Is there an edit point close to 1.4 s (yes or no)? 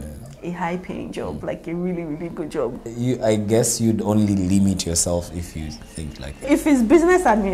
no